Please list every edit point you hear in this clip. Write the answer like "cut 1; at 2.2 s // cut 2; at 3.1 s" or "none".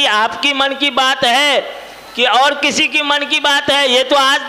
none